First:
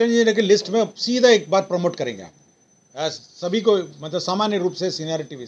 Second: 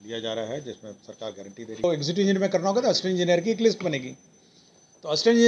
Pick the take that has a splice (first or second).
second